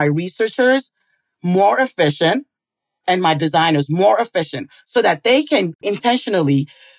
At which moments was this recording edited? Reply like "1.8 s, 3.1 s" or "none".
6.0 s